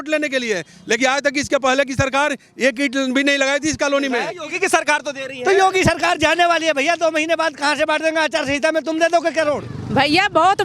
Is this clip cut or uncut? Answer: cut